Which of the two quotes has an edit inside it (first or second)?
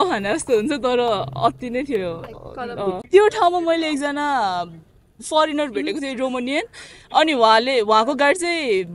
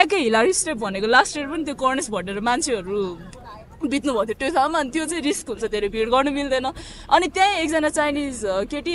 first